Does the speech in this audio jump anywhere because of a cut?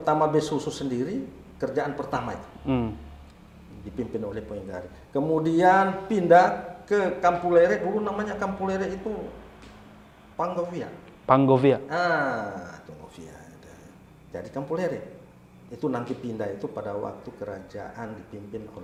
no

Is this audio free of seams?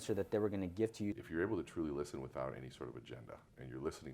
no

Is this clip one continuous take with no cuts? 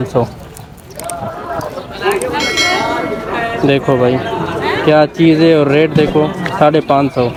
yes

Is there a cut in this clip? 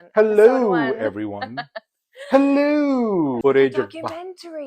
yes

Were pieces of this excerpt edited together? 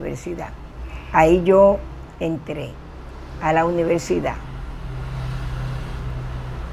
no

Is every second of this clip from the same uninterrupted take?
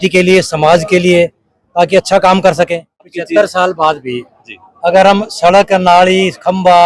no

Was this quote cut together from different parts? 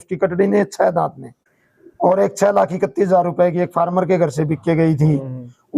yes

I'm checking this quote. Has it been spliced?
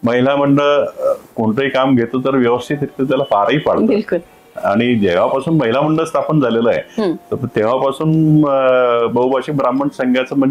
no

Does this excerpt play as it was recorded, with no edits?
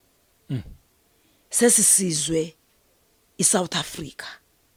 yes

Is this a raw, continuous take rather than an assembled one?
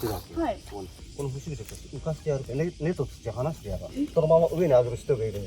no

